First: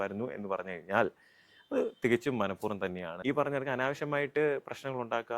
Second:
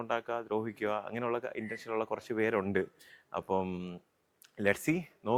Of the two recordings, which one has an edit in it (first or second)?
first